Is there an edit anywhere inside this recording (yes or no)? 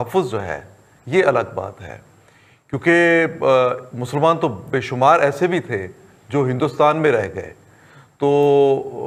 no